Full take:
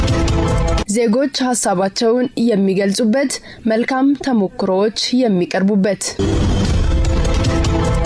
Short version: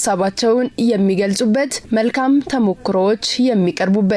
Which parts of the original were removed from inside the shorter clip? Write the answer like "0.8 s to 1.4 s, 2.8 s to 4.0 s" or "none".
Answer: 3.4 s to 3.5 s